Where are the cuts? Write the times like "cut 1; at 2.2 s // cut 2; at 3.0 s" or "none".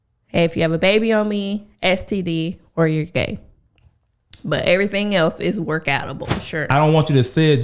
cut 1; at 6.4 s